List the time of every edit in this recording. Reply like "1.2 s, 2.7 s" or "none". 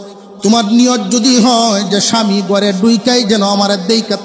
none